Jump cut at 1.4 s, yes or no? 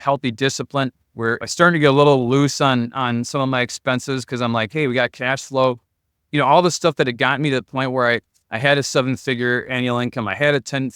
yes